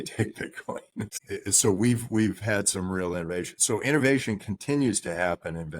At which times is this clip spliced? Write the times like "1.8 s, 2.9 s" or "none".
1.1 s